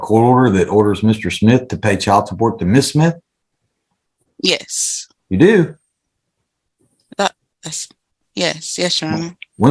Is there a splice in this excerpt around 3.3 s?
no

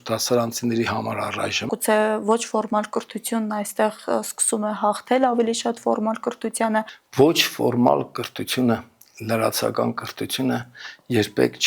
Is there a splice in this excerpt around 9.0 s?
no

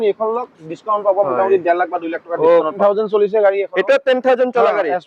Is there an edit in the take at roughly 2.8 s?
yes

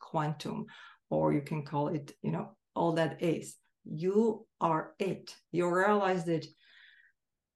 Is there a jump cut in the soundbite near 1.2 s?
no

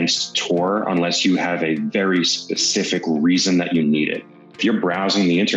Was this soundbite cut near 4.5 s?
yes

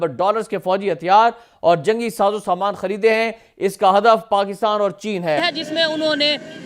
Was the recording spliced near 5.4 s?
yes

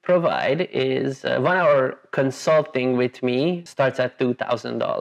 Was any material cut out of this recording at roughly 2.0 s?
no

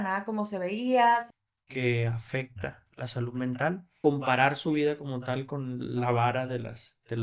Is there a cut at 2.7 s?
no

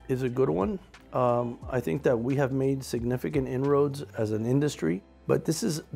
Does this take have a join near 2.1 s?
no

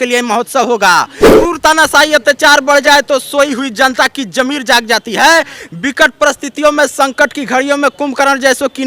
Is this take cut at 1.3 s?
yes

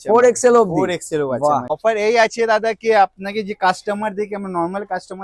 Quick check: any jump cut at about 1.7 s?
yes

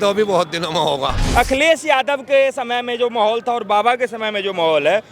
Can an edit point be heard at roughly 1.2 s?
yes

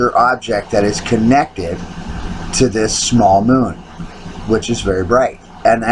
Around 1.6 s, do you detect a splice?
no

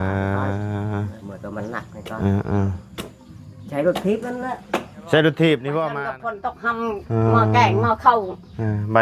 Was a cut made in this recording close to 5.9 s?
yes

